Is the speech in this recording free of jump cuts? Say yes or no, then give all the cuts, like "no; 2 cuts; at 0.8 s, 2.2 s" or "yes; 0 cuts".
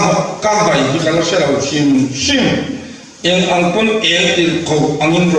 yes; 0 cuts